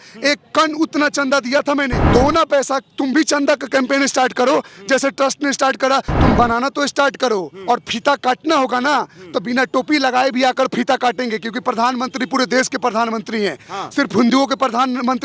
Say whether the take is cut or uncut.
cut